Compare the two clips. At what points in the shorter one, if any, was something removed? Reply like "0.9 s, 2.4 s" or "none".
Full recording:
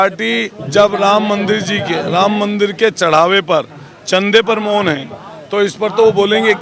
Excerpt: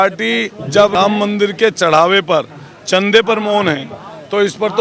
0.9 s